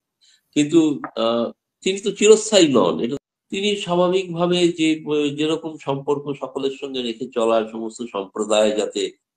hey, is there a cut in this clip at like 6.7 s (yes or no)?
no